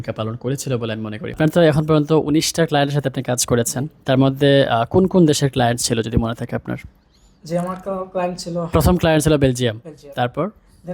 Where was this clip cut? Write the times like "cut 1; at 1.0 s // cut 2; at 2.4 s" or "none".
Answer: cut 1; at 1.4 s

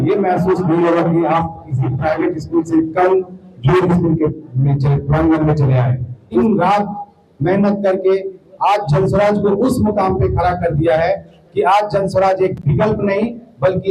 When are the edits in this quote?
cut 1; at 6.4 s

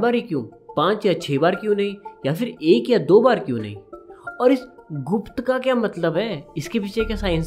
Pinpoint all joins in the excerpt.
none

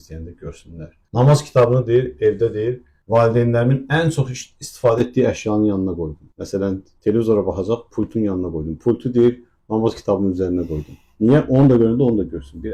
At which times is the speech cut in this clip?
none

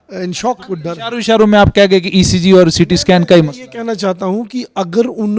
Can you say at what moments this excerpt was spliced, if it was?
cut 1; at 0.9 s

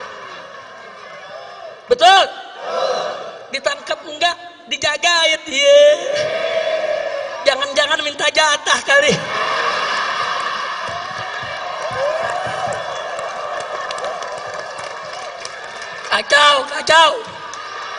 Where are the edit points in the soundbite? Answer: none

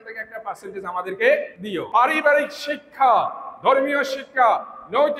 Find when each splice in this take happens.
cut 1; at 1.7 s

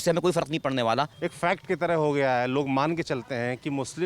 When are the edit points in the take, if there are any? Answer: cut 1; at 1.2 s

